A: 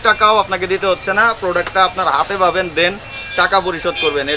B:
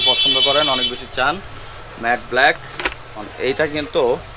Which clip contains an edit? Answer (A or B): B